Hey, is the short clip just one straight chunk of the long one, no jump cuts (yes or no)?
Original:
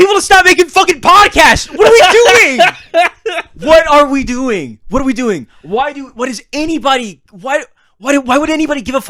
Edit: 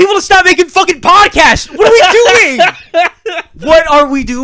yes